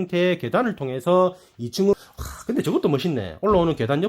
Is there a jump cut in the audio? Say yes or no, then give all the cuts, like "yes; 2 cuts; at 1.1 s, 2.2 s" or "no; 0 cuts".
yes; 1 cut; at 1.9 s